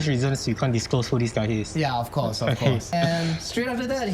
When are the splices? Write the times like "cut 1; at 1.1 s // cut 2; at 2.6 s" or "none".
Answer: cut 1; at 2.9 s

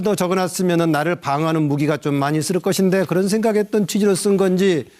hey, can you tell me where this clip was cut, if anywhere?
cut 1; at 3.1 s

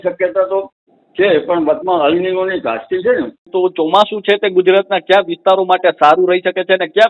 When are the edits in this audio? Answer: cut 1; at 3.5 s

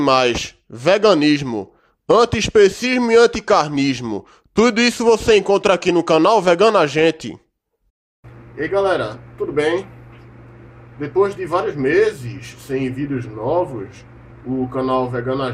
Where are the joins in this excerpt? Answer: none

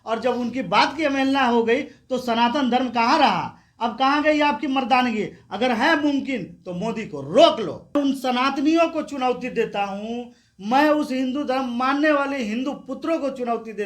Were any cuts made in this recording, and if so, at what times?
cut 1; at 8.0 s

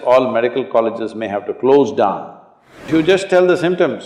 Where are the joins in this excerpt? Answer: cut 1; at 2.9 s

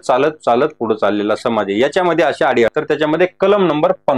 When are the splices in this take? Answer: cut 1; at 2.7 s

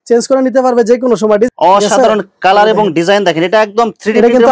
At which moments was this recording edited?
cut 1; at 1.5 s

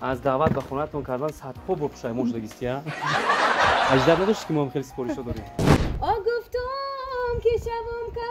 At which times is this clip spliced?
cut 1; at 5.8 s

